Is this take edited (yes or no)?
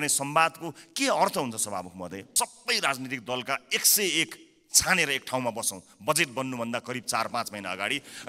yes